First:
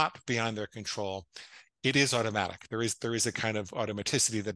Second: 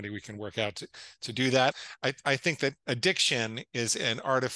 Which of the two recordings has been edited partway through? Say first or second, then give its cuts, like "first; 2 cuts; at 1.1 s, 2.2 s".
second; 1 cut; at 1.7 s